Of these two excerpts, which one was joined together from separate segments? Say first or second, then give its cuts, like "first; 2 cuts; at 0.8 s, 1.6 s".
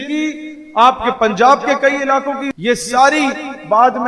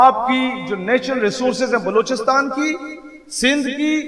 first; 1 cut; at 2.5 s